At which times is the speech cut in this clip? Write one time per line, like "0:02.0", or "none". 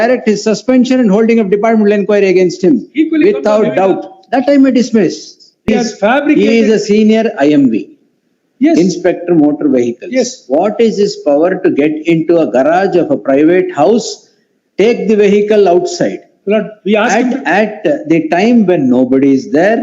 0:05.7